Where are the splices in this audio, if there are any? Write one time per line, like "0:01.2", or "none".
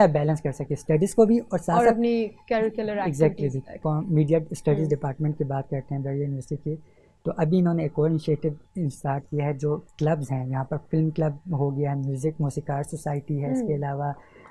0:03.8